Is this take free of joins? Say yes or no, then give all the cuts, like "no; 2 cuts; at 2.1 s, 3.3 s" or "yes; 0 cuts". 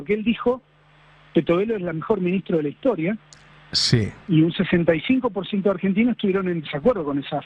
yes; 0 cuts